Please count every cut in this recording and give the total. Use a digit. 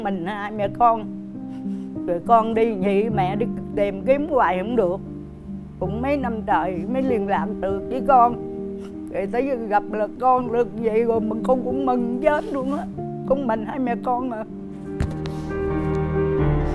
0